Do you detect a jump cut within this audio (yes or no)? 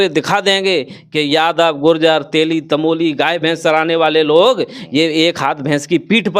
no